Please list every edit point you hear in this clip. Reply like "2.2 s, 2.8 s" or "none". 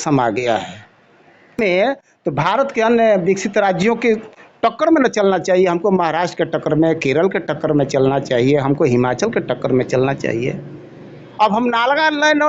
1.6 s